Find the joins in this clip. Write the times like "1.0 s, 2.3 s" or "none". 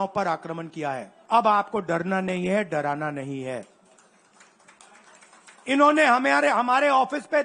1.1 s